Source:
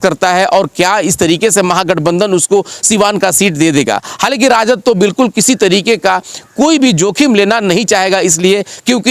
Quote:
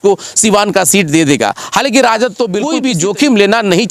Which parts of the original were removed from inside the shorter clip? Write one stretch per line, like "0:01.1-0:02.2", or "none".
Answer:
0:05.1-0:06.6